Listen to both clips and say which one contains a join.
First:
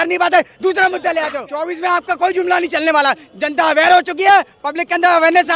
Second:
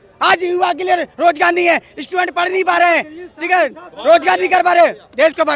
first; 1 cut; at 1.4 s

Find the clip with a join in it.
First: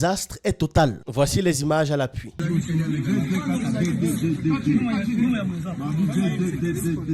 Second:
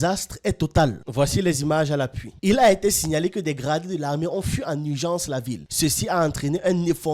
second; 1 cut; at 2.2 s

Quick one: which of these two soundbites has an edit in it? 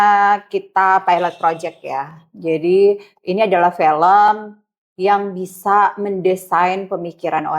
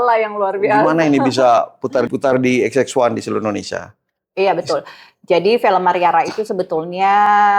second; 1 cut; at 2.1 s

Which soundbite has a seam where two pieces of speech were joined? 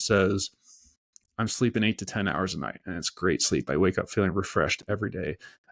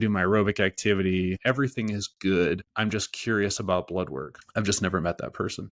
second; 3 cuts; at 1.4 s, 2.7 s, 4.4 s

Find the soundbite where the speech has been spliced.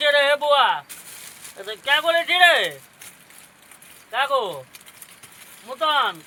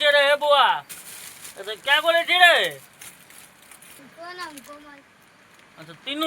second; 1 cut; at 4.0 s

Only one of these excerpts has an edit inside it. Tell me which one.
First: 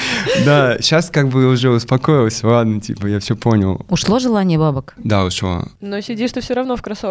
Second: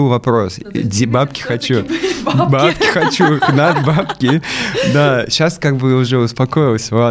first; 1 cut; at 5.3 s

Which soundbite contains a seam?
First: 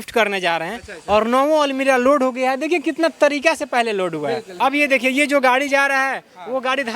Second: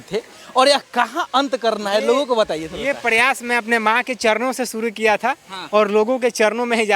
first; 1 cut; at 4.5 s

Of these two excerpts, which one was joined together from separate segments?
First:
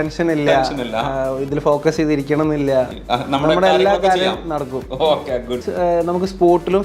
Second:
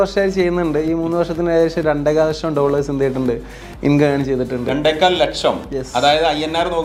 first; 1 cut; at 5.7 s

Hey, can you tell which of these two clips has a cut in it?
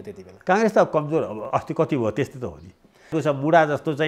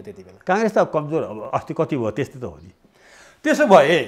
first; 1 cut; at 3.1 s

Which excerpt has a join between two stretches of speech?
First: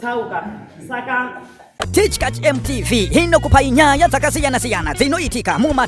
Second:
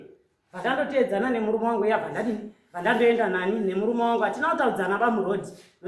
first; 1 cut; at 1.8 s

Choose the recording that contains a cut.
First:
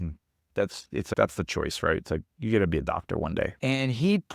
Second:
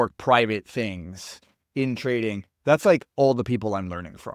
first; 2 cuts; at 1.1 s, 3.5 s

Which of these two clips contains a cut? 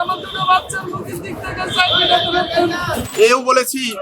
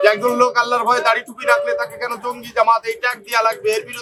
first; 1 cut; at 3.1 s

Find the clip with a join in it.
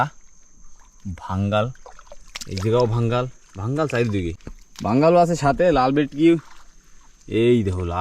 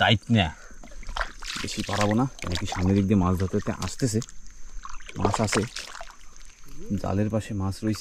first; 1 cut; at 4.4 s

